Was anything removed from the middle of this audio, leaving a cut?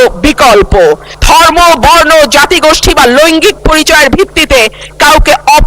yes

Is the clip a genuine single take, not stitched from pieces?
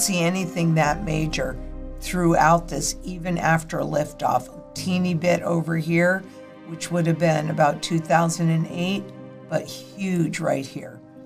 yes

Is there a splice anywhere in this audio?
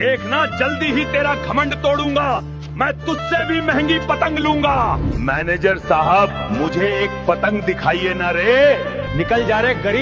no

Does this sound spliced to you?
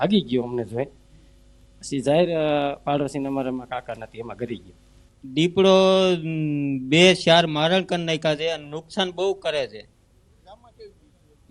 no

